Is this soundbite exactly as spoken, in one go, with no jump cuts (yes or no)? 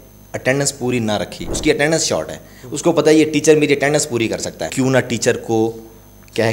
no